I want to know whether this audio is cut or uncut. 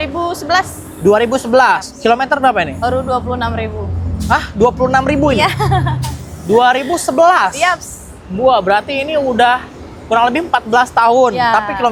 uncut